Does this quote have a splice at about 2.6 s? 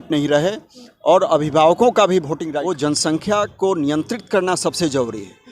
yes; 1 cut; at 2.6 s

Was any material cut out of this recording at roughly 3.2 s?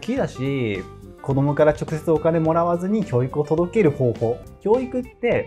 no; 1 cut; at 4.4 s

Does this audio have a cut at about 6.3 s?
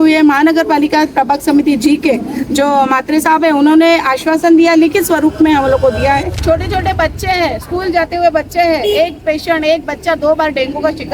yes; 1 cut; at 6.3 s

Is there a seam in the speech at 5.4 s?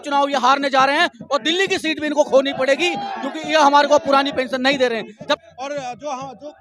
yes; 1 cut; at 5.4 s

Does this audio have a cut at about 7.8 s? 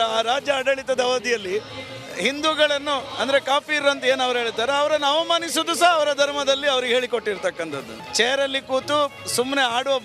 yes; 1 cut; at 7.8 s

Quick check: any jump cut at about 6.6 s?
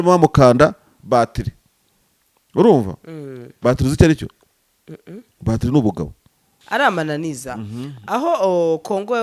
yes; 1 cut; at 6.6 s

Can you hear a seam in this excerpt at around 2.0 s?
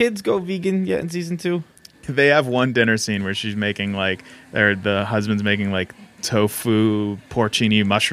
yes; 1 cut; at 2.0 s

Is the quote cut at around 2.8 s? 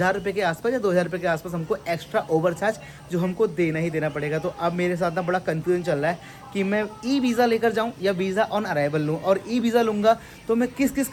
no; 0 cuts

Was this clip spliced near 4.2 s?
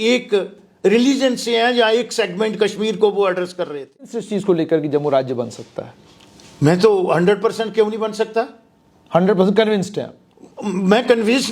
yes; 1 cut; at 4.2 s

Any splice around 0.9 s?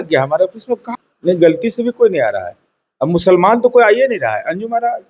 yes; 1 cut; at 0.9 s

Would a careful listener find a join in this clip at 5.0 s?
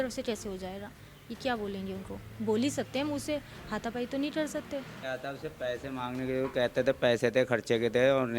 yes; 1 cut; at 5.0 s

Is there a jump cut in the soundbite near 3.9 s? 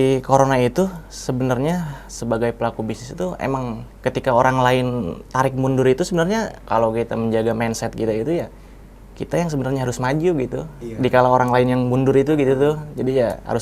yes; 2 cuts; at 3.9 s, 6.6 s

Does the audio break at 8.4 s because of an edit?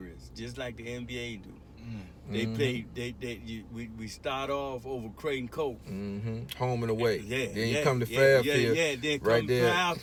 no; 0 cuts

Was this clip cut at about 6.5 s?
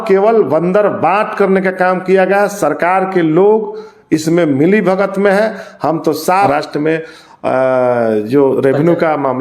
yes; 1 cut; at 6.5 s

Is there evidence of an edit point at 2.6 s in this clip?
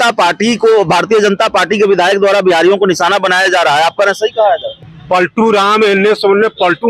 no; 1 cut; at 4.7 s

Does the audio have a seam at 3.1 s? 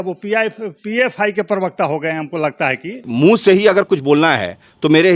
yes; 1 cut; at 3.1 s

